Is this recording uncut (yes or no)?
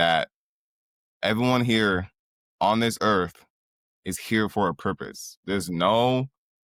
yes